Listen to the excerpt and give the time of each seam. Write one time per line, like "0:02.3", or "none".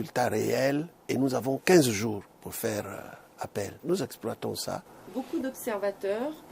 0:04.5